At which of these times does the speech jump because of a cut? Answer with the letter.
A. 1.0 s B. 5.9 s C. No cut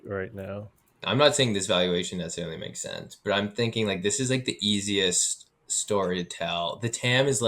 A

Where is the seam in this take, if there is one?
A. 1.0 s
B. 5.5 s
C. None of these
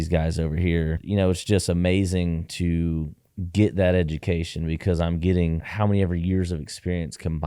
A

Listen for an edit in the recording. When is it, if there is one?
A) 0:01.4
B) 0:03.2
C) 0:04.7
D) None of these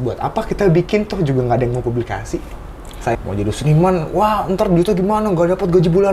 B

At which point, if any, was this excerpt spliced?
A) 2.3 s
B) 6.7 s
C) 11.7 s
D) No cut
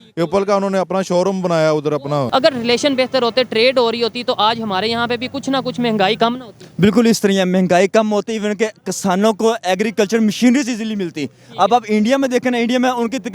A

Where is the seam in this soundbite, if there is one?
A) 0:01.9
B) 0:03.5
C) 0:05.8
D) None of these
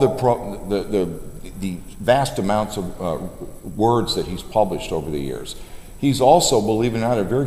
D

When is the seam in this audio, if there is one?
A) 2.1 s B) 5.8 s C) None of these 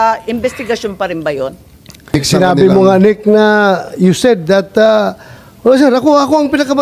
A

